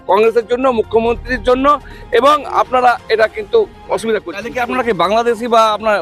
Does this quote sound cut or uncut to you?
cut